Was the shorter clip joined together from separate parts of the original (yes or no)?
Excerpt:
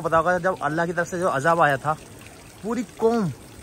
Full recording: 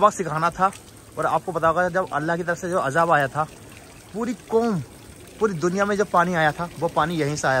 no